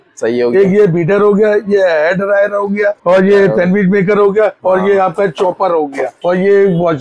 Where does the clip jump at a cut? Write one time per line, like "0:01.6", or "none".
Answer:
0:03.0
0:04.6
0:06.1